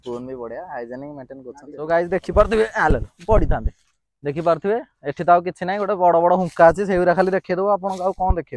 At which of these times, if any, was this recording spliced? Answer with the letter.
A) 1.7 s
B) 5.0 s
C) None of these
A